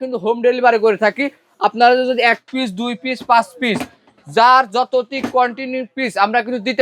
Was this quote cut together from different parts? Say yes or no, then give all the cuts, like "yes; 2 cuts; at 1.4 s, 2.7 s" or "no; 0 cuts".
no; 0 cuts